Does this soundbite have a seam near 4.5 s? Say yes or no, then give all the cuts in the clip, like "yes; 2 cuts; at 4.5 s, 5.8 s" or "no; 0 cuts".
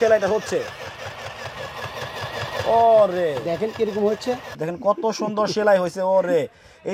yes; 1 cut; at 4.5 s